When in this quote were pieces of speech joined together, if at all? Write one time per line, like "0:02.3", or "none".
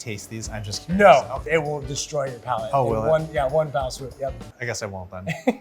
0:01.4
0:04.4